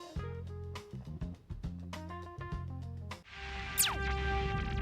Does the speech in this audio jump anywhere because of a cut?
yes; 1 cut; at 3.2 s

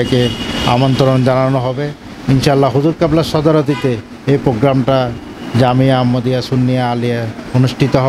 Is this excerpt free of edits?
yes; 0 cuts

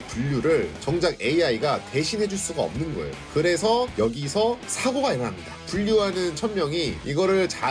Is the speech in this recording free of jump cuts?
yes; 0 cuts

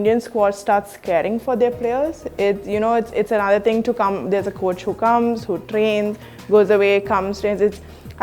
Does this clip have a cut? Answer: no; 0 cuts

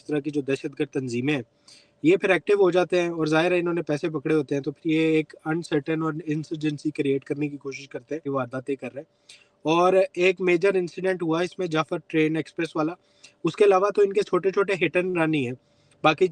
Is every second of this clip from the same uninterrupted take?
no; 1 cut; at 8.3 s

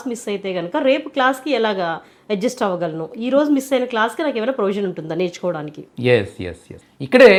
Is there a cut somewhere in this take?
no; 0 cuts

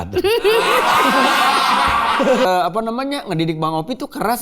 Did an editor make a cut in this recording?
yes; 1 cut; at 2.5 s

